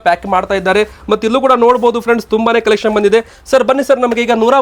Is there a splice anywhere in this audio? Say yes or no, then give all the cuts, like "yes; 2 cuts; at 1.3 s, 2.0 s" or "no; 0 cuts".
no; 0 cuts